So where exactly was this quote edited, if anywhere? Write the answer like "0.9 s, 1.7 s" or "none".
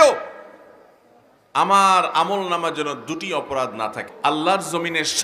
4.1 s